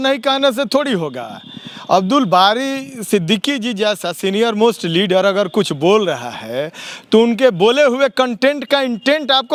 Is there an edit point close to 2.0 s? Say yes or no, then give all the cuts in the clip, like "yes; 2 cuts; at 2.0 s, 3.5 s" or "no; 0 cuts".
no; 0 cuts